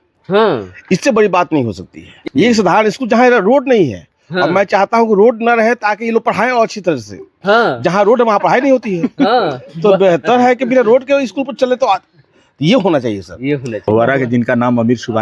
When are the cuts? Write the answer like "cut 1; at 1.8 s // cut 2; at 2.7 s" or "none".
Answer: cut 1; at 2.3 s // cut 2; at 13.8 s